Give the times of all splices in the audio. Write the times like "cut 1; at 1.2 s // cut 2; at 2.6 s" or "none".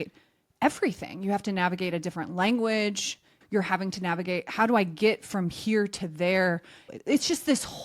cut 1; at 3.4 s // cut 2; at 6.8 s